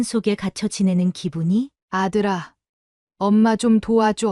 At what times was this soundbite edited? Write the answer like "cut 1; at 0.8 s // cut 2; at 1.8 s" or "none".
cut 1; at 1.8 s

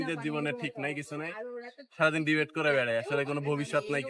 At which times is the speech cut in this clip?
none

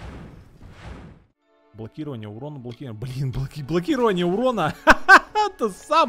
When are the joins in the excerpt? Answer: cut 1; at 1.3 s

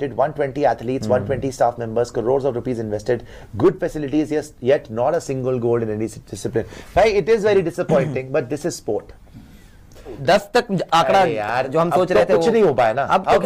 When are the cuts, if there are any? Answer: none

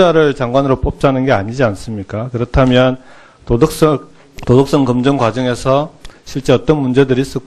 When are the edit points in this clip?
none

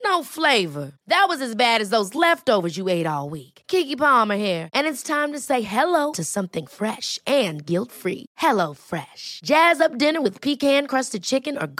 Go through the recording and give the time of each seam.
none

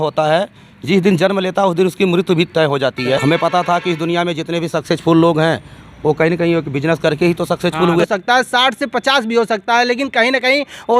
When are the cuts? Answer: cut 1; at 3.2 s // cut 2; at 8.0 s

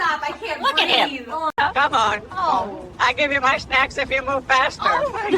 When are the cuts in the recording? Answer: cut 1; at 1.5 s

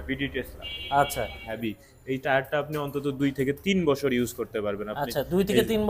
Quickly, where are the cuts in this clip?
cut 1; at 1.5 s

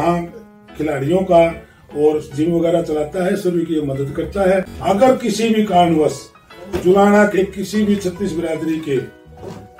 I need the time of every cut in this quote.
cut 1; at 4.7 s

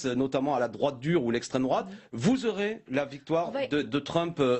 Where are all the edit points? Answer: none

